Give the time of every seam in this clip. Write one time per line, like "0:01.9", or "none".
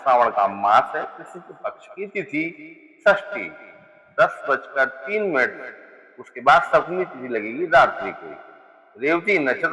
none